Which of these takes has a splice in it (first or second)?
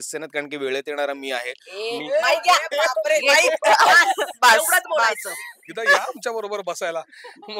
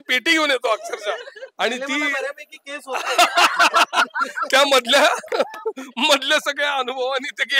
first